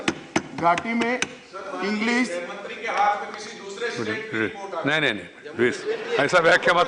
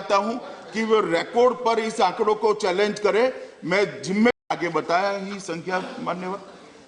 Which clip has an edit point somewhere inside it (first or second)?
second